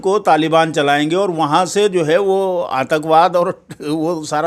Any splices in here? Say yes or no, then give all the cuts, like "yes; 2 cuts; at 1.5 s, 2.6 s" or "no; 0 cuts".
no; 0 cuts